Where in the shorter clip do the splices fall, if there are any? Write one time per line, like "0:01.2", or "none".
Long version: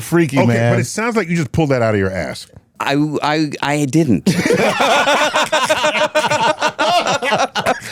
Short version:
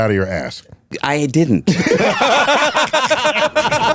0:00.9